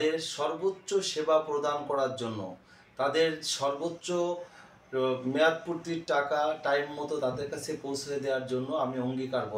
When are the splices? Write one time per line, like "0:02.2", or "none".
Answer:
none